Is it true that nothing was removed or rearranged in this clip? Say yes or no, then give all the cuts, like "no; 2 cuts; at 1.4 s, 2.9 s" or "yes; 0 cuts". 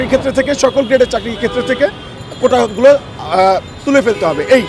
yes; 0 cuts